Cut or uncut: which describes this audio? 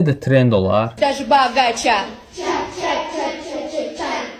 cut